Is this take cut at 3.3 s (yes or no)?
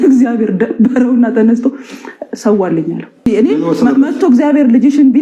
yes